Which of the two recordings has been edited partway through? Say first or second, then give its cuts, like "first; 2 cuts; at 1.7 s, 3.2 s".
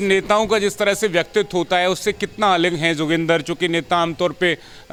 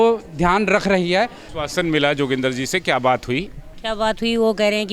second; 1 cut; at 1.4 s